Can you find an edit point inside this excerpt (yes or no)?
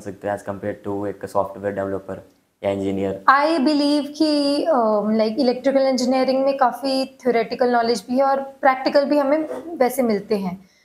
no